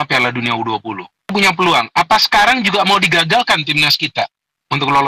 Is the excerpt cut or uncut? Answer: cut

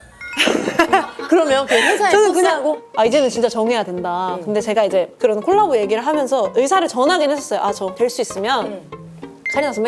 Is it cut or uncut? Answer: cut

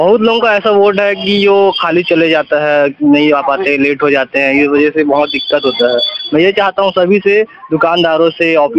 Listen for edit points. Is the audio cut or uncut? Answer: uncut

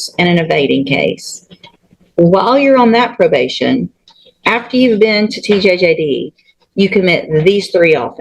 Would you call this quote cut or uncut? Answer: uncut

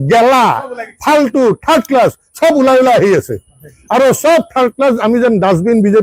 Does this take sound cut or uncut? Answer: uncut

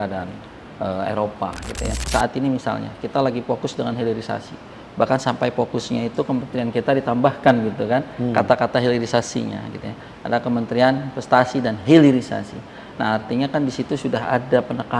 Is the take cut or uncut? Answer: cut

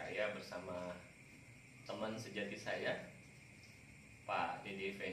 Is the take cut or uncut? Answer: uncut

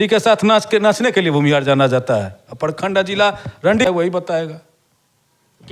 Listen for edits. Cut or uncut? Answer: cut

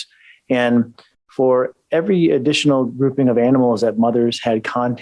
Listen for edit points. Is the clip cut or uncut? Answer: uncut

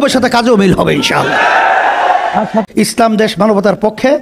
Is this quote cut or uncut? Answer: cut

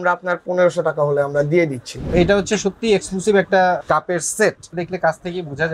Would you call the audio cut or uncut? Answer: cut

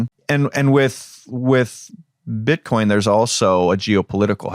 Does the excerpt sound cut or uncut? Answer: uncut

